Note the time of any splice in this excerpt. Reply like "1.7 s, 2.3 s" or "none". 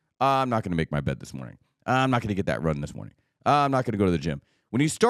none